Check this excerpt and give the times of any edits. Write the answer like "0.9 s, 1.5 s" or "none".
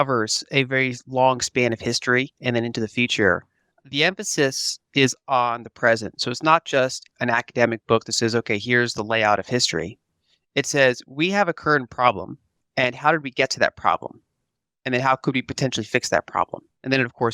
7.0 s